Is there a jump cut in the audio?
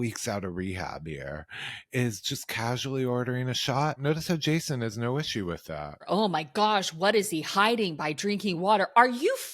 yes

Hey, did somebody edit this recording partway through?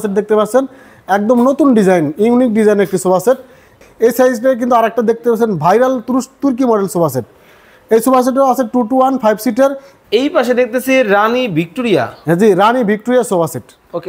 yes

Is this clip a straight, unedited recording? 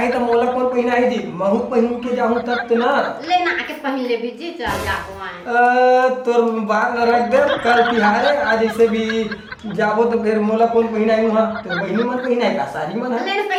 yes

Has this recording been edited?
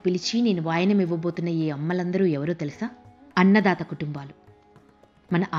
no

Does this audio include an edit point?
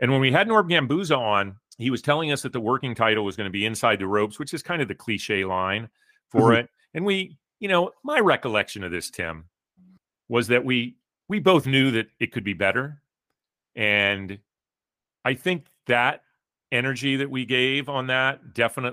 yes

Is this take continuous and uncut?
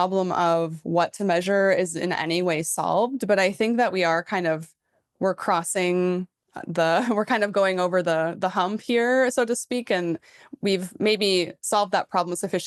yes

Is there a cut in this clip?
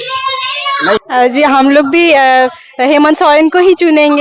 yes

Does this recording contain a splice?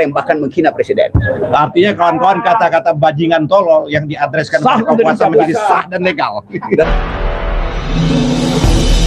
yes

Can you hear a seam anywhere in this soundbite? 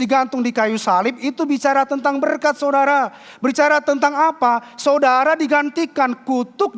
no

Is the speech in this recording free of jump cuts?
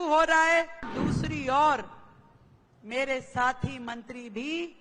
no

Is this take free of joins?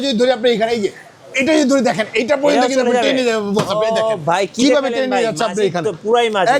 yes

